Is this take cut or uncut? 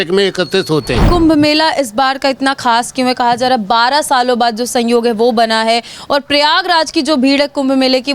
cut